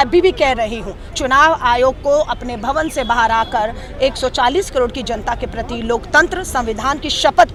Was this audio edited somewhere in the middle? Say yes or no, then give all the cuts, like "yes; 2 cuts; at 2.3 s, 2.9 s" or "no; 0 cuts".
no; 0 cuts